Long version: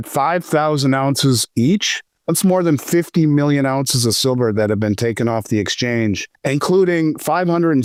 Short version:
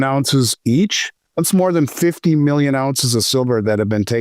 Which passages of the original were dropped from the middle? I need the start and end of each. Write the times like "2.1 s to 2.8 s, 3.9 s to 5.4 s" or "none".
none